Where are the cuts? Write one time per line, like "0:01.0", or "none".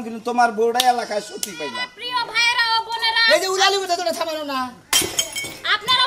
0:01.9